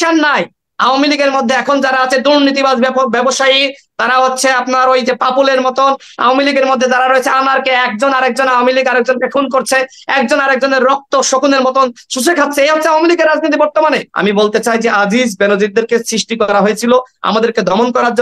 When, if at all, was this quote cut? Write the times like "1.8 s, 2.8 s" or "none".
14.1 s